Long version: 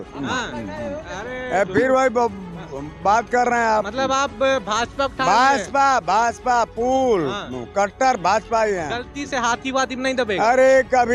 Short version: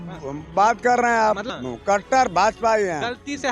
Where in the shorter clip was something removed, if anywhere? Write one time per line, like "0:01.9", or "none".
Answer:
0:01.5